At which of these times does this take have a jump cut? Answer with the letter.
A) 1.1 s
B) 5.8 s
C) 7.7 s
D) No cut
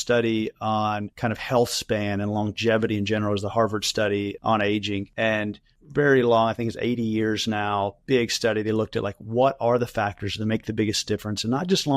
A